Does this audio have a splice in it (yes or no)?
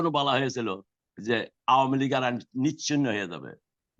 no